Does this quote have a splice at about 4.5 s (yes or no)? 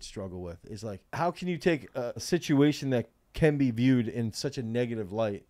no